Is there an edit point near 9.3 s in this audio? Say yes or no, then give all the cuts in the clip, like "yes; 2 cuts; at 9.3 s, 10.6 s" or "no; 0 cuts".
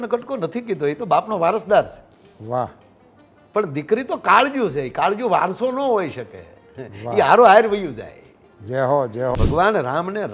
yes; 1 cut; at 9.3 s